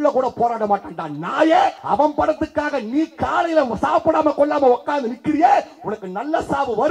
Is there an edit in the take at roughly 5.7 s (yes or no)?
no